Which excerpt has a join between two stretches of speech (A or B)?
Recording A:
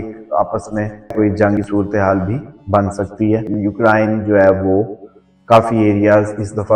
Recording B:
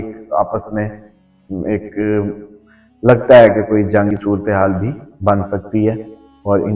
A